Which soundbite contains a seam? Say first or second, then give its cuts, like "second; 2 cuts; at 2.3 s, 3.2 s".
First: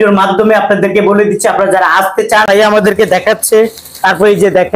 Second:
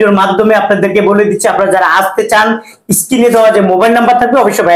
first; 1 cut; at 2.5 s